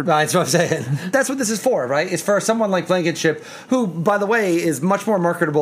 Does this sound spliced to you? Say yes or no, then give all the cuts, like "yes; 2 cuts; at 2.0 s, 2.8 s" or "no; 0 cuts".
yes; 1 cut; at 1.1 s